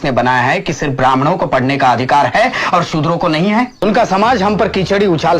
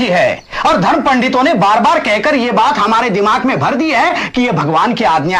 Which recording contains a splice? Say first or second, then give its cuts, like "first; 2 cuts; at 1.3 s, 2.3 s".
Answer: first; 1 cut; at 3.8 s